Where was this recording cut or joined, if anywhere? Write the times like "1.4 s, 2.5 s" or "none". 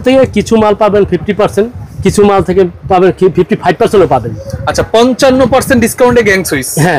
none